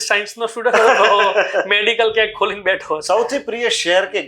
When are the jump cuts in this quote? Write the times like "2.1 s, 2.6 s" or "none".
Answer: 3.0 s

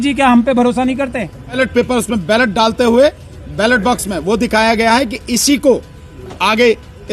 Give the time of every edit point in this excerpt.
1.6 s

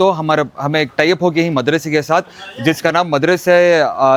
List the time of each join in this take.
none

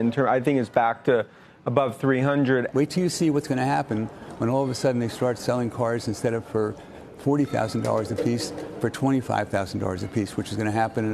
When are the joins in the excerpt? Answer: 2.7 s

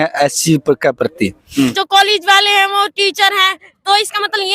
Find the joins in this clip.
1.5 s

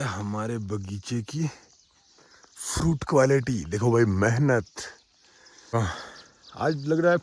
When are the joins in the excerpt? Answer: 5.7 s

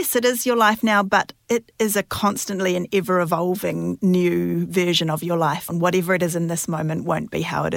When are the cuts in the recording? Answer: 5.7 s

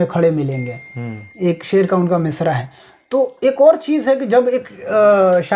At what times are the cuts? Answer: none

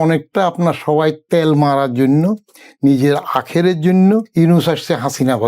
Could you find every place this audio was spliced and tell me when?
4.3 s

